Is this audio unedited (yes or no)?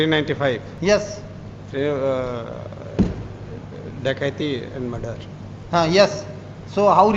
yes